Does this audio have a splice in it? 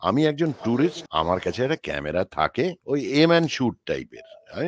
yes; 2 cuts; at 1.0 s, 2.8 s

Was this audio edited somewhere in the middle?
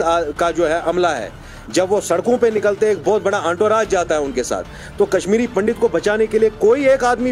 no; 0 cuts

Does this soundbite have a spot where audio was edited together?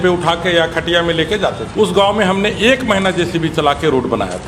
yes; 1 cut; at 1.6 s

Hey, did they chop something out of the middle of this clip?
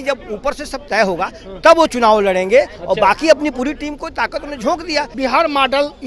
yes; 1 cut; at 5.1 s

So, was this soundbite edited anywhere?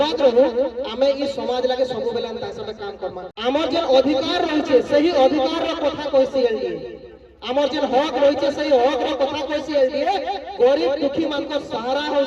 yes; 1 cut; at 3.3 s

